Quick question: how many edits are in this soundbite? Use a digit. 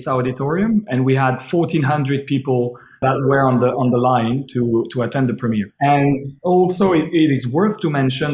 2